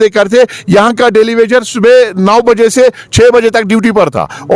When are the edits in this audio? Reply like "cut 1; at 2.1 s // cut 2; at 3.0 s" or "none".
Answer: none